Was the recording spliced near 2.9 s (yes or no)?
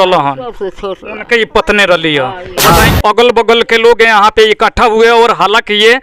yes